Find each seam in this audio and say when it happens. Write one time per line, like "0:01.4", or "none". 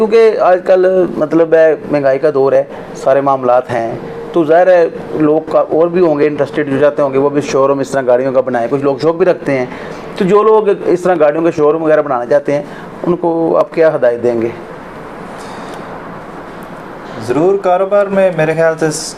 none